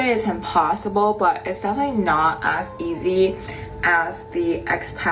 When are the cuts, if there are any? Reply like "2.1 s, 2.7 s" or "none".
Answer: none